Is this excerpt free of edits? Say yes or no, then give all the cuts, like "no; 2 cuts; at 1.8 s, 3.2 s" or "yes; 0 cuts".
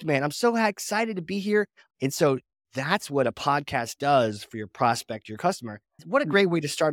no; 2 cuts; at 1.8 s, 6.0 s